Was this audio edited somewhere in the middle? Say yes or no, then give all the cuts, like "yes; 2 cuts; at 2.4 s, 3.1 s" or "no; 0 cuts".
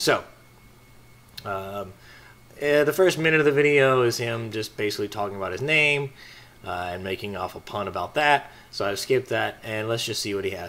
yes; 1 cut; at 5.8 s